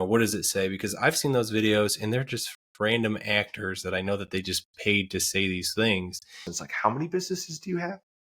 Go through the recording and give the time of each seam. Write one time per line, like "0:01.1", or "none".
0:06.6